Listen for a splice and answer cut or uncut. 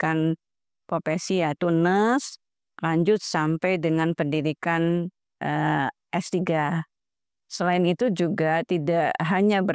uncut